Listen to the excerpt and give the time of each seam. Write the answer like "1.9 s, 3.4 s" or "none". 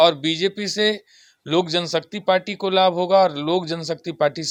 none

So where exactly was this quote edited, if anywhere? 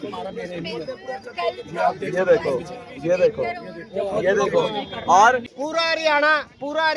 5.5 s

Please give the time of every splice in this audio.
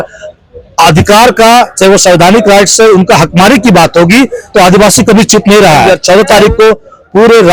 5.9 s

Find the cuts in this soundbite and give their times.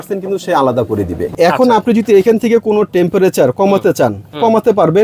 1.3 s

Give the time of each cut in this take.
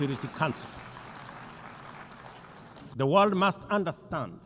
2.9 s

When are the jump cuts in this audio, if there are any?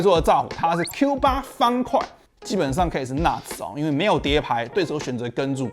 2.2 s, 4.7 s

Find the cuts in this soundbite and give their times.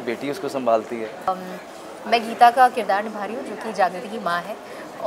1.3 s

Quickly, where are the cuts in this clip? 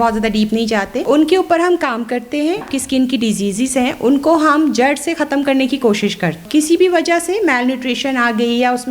1.0 s, 2.6 s, 6.4 s

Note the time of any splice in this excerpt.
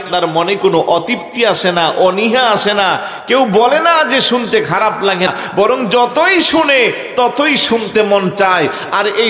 5.3 s

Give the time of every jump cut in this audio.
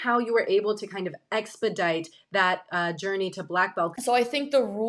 4.0 s

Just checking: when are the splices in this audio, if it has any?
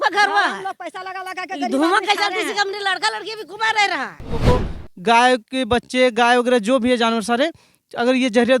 4.4 s

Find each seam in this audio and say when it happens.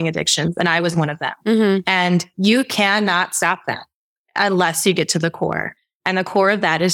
none

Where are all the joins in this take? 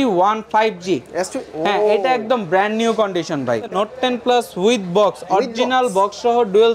3.7 s

